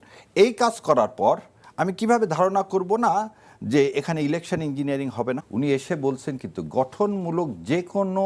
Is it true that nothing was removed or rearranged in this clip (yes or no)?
no